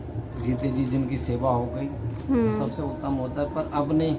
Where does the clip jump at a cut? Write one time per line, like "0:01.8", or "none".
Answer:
none